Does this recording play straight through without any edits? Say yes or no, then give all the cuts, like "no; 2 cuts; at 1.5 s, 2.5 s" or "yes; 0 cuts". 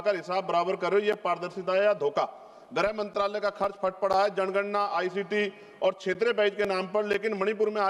yes; 0 cuts